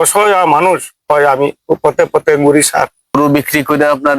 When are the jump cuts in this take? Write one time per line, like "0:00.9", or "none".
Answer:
0:03.1